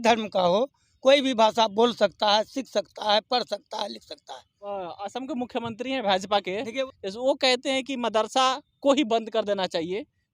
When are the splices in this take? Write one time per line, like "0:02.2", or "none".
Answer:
0:04.6
0:06.9